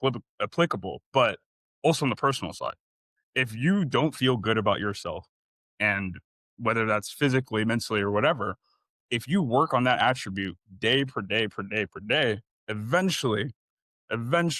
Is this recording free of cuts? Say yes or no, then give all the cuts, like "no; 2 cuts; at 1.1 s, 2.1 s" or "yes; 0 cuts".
yes; 0 cuts